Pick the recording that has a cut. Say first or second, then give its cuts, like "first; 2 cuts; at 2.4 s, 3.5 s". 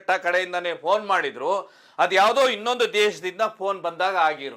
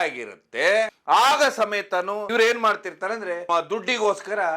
second; 3 cuts; at 1.0 s, 2.2 s, 3.5 s